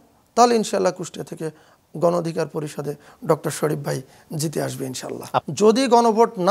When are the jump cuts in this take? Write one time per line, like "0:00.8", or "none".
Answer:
0:05.3